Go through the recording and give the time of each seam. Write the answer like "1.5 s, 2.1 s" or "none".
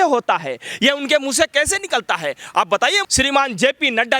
3.1 s